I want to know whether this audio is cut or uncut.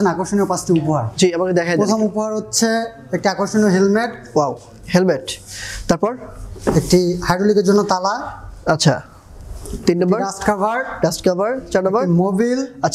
uncut